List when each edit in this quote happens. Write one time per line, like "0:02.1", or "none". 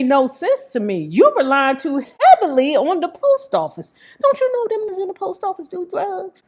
0:02.0
0:04.9